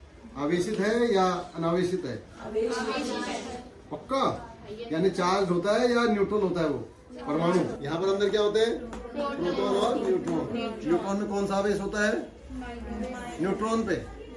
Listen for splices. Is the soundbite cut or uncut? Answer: cut